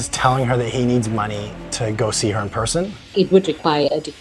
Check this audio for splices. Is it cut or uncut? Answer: cut